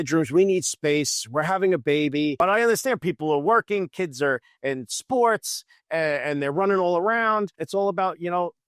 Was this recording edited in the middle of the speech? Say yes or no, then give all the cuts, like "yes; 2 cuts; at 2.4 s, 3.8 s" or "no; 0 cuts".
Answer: yes; 2 cuts; at 2.4 s, 7.6 s